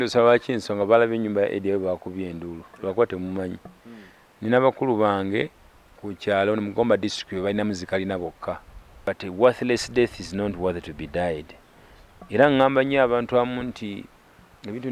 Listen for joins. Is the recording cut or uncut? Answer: cut